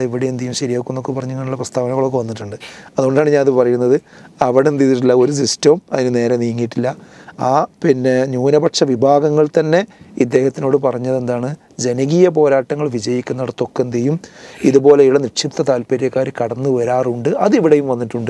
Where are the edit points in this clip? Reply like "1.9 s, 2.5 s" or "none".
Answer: none